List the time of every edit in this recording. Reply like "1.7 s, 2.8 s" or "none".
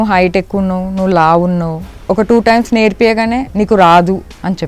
3.4 s